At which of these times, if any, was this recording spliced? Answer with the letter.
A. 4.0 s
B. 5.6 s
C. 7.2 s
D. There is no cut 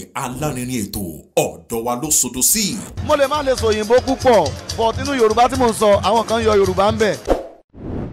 C